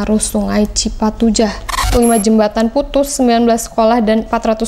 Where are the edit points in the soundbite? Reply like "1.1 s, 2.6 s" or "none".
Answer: 1.9 s